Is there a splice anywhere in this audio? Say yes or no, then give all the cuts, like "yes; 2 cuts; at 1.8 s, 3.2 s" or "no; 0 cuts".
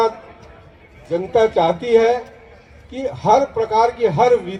no; 0 cuts